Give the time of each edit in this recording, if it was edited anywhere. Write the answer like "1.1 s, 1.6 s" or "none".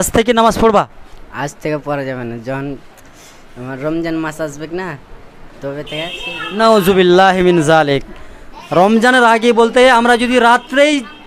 none